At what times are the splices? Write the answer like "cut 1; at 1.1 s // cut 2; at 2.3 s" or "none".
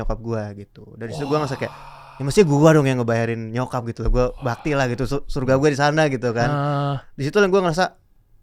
none